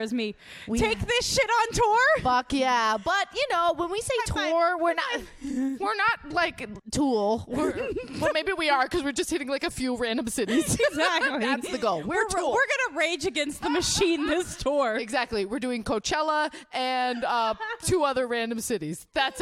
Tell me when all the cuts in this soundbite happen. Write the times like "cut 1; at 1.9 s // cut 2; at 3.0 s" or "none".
none